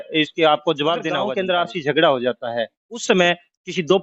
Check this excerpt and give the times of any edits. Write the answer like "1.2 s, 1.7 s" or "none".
1.2 s

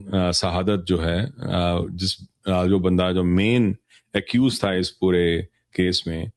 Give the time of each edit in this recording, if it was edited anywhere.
none

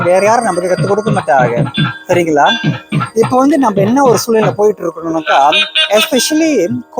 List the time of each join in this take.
none

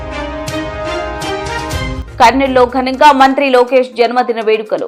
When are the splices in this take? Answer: none

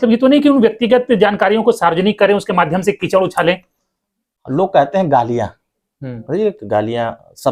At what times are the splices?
none

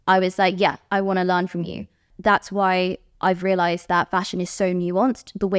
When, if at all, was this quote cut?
2.1 s

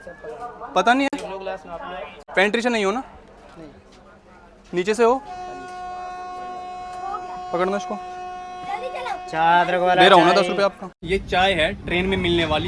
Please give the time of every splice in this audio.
none

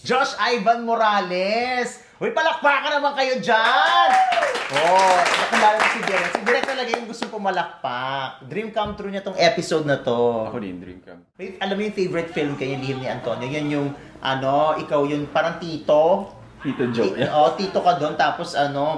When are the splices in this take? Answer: 11.5 s

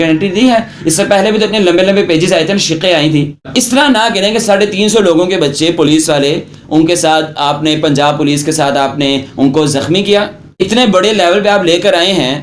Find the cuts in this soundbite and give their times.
3.5 s, 10.4 s

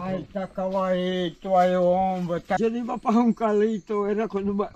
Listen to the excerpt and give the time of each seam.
2.6 s

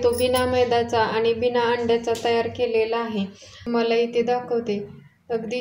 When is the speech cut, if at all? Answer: 3.7 s

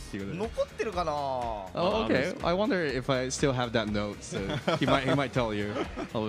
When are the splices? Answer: none

